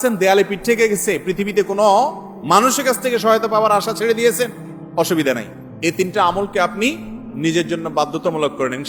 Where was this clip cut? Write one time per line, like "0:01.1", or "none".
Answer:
none